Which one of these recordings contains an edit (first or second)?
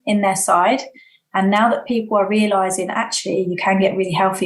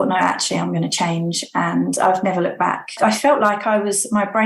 second